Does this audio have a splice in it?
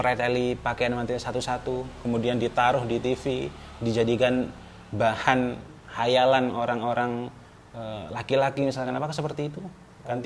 no; 0 cuts

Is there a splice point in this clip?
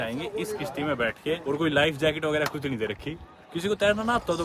no; 0 cuts

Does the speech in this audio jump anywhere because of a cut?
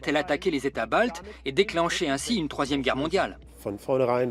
yes; 1 cut; at 3.4 s

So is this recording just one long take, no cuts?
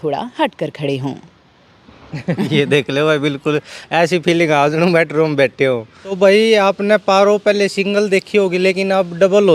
no; 1 cut; at 6.0 s

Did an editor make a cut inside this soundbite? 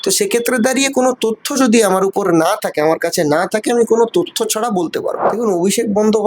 yes; 1 cut; at 5.3 s

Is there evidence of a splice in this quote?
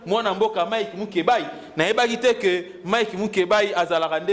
no; 0 cuts

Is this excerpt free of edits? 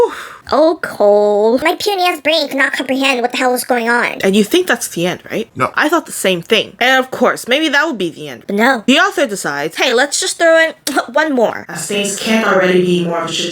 no; 5 cuts; at 1.6 s, 4.1 s, 6.7 s, 8.4 s, 11.6 s

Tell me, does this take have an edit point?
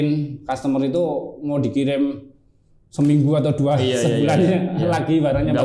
no; 0 cuts

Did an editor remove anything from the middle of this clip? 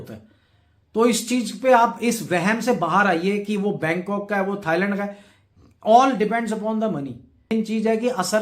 yes; 1 cut; at 7.5 s

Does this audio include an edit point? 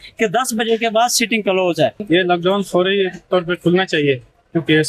yes; 1 cut; at 2.0 s

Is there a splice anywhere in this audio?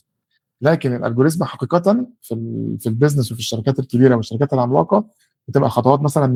no; 0 cuts

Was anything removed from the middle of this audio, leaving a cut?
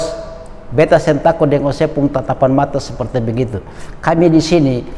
no; 0 cuts

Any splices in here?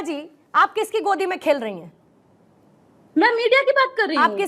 no; 0 cuts

